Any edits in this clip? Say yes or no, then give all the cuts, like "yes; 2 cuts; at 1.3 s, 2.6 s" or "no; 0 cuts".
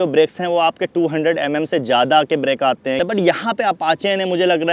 yes; 1 cut; at 3.0 s